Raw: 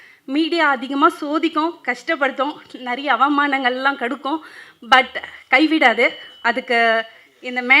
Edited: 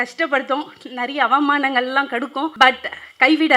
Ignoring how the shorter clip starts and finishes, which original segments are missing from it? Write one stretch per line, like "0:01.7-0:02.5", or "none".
0:04.4-0:04.8